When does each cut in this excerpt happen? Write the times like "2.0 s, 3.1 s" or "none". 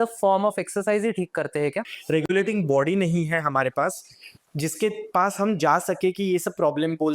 2.3 s